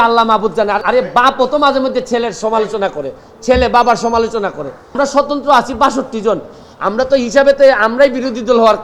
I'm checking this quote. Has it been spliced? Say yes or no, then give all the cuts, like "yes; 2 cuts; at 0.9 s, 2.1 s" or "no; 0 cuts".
yes; 2 cuts; at 0.8 s, 5.0 s